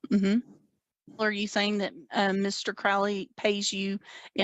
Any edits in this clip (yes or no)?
yes